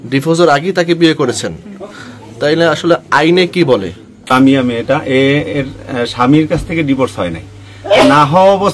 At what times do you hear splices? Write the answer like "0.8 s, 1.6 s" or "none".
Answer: 4.3 s